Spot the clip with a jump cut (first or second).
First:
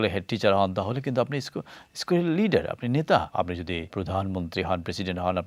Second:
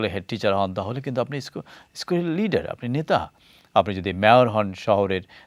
first